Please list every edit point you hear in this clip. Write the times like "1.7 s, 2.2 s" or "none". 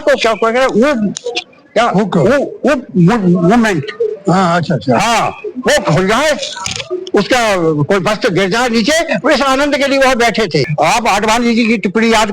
10.7 s

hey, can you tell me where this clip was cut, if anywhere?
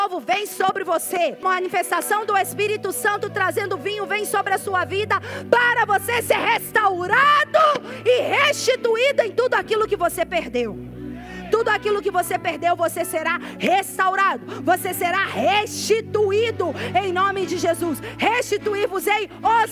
1.4 s

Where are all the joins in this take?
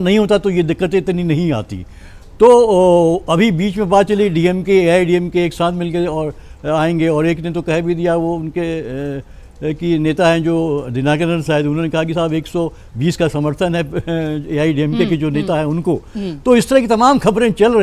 none

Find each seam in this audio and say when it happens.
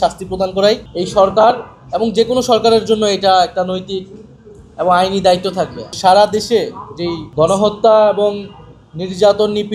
0.9 s, 5.8 s, 7.2 s

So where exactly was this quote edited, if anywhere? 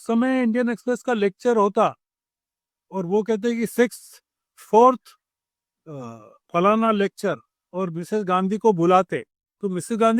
none

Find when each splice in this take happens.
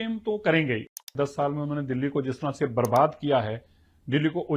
1.0 s

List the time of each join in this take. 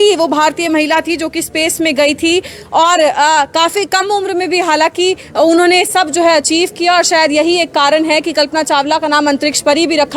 none

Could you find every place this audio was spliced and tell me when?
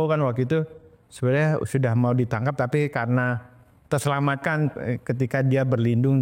none

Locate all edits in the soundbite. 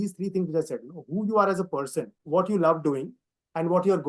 2.2 s

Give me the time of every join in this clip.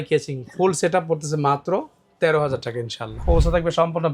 3.2 s

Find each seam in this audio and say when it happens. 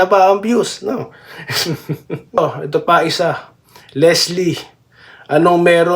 2.4 s

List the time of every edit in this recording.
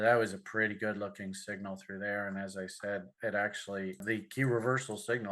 4.0 s

